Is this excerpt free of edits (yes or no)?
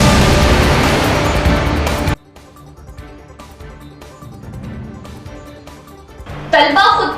no